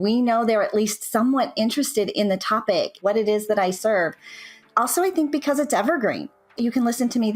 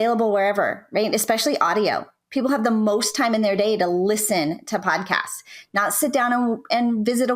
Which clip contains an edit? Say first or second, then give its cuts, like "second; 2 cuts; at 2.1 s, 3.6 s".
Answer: first; 3 cuts; at 3.0 s, 4.6 s, 6.5 s